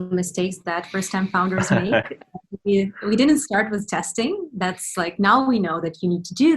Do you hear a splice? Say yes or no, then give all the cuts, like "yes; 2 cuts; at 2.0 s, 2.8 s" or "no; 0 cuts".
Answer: no; 0 cuts